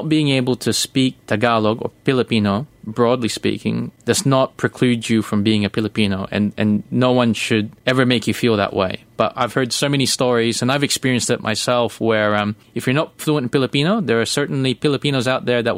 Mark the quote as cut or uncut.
cut